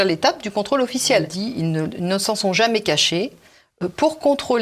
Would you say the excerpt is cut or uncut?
cut